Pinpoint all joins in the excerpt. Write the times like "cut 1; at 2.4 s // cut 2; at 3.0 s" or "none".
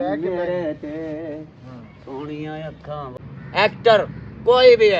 cut 1; at 3.1 s